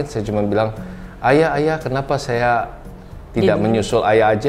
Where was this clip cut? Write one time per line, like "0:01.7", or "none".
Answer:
none